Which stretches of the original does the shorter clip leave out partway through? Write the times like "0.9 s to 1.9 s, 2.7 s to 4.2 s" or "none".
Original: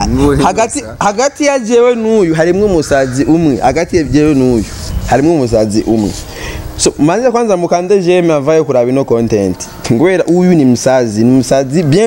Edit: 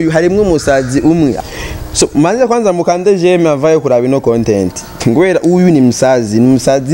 3.6 s to 6.2 s